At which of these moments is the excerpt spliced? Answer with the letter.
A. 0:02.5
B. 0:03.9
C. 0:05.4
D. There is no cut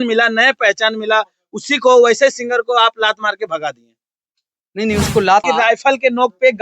C